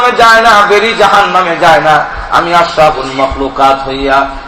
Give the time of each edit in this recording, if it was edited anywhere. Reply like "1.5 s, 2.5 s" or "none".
3.3 s